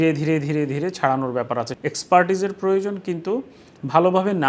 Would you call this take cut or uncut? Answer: uncut